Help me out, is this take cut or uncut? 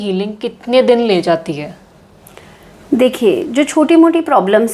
uncut